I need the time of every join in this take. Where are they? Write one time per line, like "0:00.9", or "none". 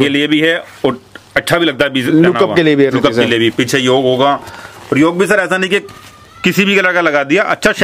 none